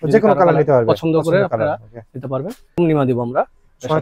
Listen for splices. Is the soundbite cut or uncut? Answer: cut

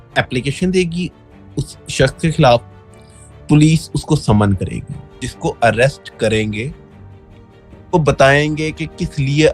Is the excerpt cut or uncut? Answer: cut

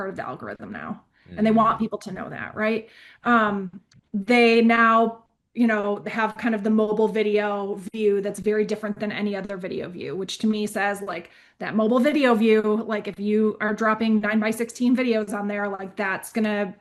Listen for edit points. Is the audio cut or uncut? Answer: uncut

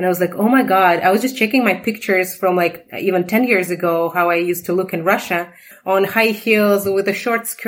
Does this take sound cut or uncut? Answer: cut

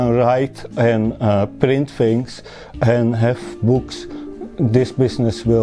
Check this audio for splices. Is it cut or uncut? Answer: uncut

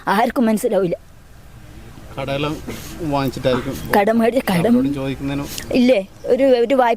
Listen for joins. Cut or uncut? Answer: uncut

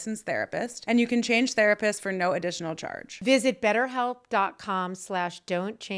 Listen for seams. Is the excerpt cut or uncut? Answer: uncut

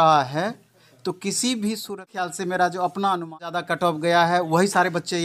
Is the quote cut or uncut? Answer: cut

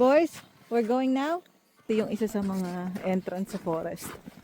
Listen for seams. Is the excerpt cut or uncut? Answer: cut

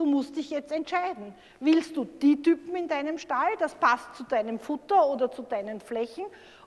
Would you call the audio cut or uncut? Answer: uncut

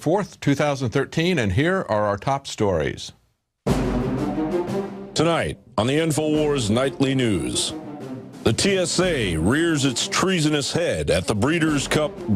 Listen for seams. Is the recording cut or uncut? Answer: uncut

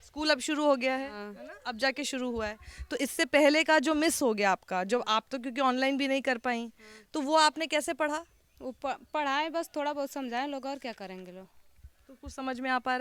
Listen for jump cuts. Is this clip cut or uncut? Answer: uncut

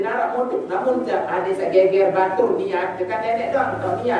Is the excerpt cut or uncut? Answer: uncut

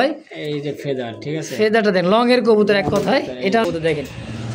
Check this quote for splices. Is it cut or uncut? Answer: cut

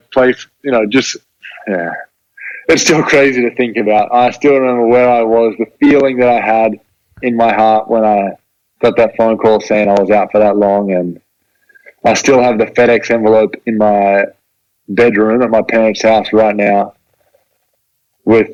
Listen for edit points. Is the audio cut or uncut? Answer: uncut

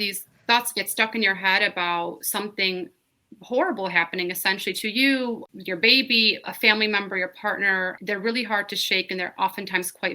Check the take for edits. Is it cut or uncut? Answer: cut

